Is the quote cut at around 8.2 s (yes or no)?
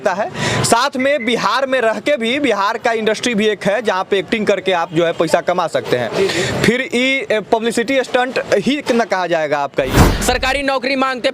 no